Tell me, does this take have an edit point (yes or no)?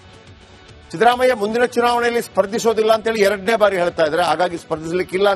yes